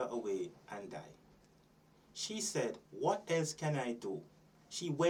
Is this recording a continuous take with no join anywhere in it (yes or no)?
yes